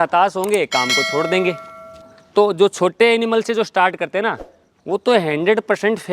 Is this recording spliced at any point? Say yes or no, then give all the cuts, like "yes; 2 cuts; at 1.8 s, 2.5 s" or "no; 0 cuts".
yes; 1 cut; at 1.9 s